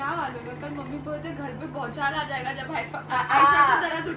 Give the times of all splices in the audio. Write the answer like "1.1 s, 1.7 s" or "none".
none